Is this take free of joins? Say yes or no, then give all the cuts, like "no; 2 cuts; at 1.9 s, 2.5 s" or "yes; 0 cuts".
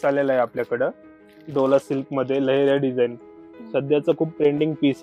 yes; 0 cuts